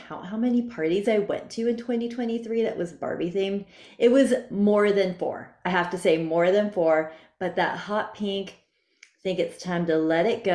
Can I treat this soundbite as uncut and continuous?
yes; 0 cuts

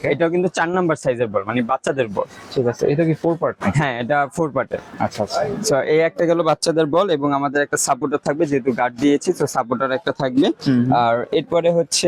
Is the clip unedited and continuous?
yes; 0 cuts

